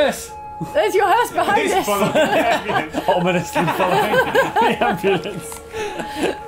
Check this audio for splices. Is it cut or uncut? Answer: uncut